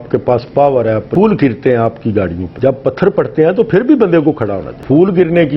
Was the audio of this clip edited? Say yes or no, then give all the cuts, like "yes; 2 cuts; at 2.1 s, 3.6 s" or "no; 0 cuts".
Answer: yes; 1 cut; at 1.1 s